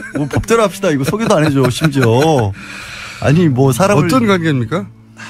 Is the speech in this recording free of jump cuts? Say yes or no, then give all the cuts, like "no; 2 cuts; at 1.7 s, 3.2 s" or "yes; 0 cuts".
no; 1 cut; at 3.2 s